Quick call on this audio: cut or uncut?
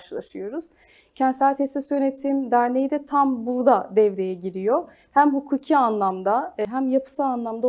cut